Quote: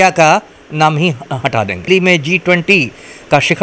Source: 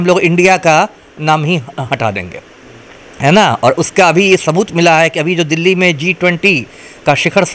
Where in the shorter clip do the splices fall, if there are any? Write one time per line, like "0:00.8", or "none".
0:01.9